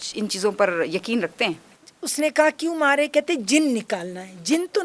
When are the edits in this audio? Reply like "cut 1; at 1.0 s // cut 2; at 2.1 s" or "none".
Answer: cut 1; at 1.7 s